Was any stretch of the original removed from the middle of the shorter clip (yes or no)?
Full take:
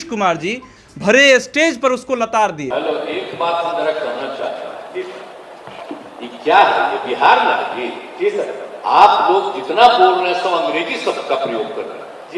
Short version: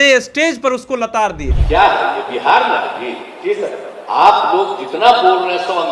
yes